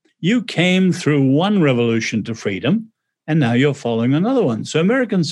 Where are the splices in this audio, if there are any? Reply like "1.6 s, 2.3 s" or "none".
none